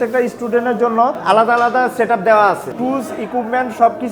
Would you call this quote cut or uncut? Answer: cut